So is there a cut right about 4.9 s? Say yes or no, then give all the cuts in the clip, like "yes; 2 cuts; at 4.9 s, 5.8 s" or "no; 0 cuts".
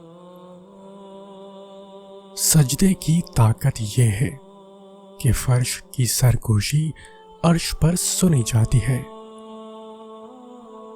no; 3 cuts; at 1.1 s, 2.5 s, 9.0 s